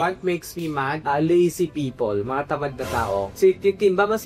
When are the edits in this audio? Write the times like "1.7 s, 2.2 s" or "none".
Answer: none